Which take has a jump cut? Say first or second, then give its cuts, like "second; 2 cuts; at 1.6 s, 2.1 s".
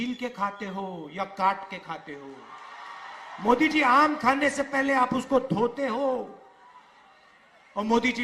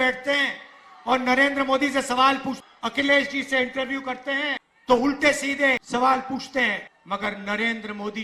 second; 4 cuts; at 2.6 s, 4.7 s, 5.8 s, 6.9 s